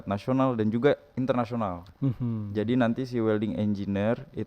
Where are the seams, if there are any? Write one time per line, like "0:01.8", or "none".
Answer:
0:01.8